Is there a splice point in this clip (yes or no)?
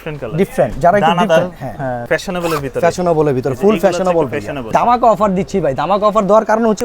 yes